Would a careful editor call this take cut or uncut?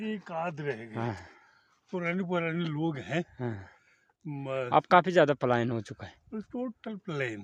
uncut